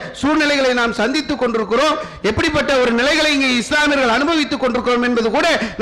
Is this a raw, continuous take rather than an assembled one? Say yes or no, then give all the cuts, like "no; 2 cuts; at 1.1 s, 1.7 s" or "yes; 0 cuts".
yes; 0 cuts